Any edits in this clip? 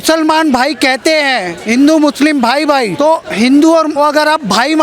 yes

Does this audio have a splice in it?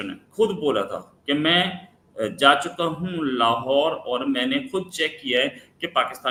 no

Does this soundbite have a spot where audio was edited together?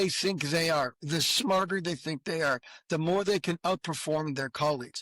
no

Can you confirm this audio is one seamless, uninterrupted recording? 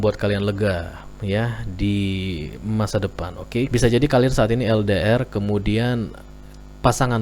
no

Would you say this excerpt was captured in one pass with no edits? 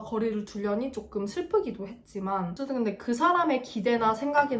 no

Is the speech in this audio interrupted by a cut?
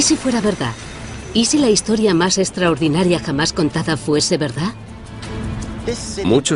yes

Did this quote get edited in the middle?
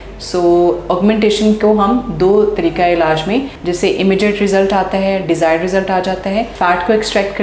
yes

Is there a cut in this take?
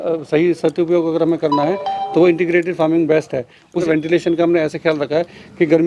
yes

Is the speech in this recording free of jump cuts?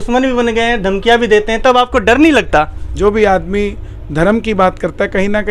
no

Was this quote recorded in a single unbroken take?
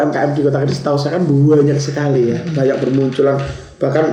yes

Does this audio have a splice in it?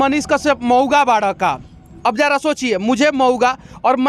no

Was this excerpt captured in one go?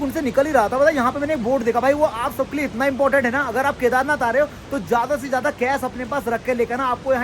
yes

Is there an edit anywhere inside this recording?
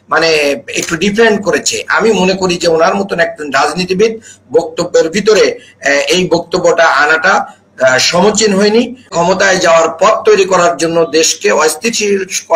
yes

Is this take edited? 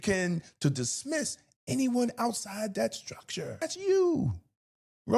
yes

